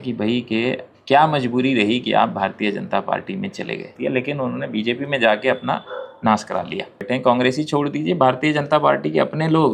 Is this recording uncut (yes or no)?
no